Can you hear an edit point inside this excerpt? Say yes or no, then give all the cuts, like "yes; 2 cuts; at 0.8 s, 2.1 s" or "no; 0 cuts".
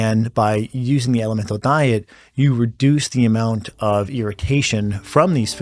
no; 0 cuts